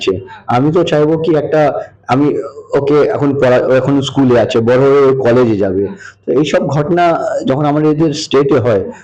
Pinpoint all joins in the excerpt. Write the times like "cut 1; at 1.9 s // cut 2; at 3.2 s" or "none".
none